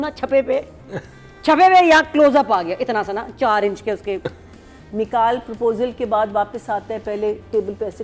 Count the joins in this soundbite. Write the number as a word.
one